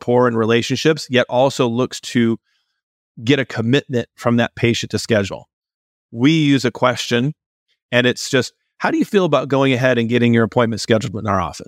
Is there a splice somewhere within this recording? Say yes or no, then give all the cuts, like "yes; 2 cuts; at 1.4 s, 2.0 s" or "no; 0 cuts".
yes; 2 cuts; at 5.9 s, 7.6 s